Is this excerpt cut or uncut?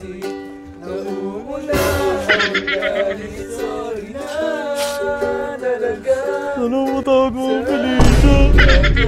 uncut